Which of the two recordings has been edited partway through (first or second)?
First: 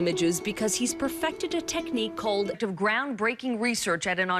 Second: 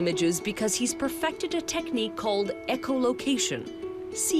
second